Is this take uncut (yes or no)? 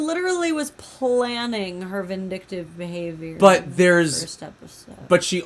yes